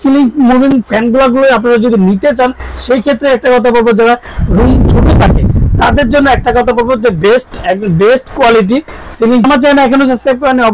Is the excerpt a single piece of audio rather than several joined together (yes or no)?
yes